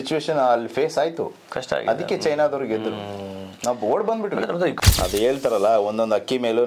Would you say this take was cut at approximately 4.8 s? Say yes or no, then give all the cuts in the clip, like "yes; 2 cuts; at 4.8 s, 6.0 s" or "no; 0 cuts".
yes; 1 cut; at 4.8 s